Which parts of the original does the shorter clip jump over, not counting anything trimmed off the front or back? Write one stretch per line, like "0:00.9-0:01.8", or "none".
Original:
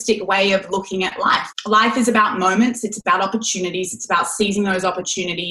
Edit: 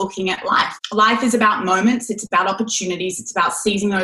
none